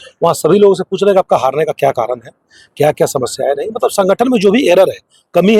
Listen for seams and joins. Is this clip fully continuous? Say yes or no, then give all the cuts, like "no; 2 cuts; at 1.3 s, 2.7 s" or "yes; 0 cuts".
yes; 0 cuts